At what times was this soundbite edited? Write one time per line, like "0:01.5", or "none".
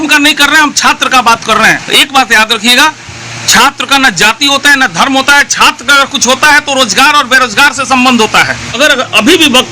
0:01.8
0:08.8